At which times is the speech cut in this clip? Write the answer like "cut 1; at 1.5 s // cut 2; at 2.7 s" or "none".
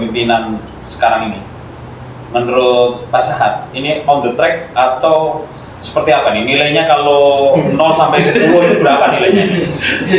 none